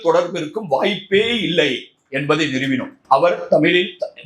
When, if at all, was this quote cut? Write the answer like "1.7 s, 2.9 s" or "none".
2.9 s